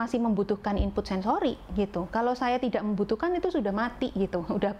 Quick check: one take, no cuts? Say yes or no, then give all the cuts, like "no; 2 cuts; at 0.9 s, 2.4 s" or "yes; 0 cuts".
yes; 0 cuts